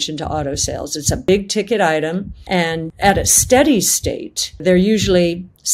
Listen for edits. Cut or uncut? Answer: cut